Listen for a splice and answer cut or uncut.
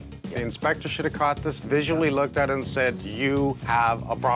uncut